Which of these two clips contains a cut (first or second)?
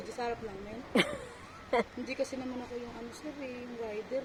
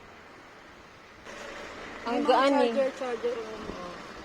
second